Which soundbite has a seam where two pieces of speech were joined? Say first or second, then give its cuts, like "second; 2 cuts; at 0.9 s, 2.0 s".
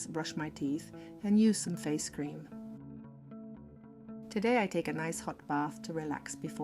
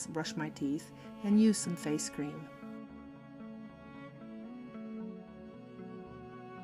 first; 2 cuts; at 2.4 s, 4.3 s